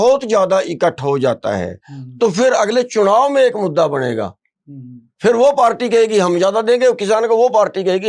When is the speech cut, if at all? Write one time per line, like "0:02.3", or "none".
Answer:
none